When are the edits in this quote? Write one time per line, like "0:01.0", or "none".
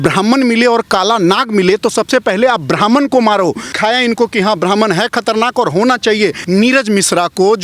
0:03.7
0:06.4